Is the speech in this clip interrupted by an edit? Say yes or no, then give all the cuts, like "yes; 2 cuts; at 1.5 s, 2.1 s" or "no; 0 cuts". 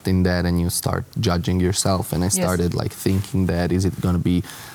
no; 0 cuts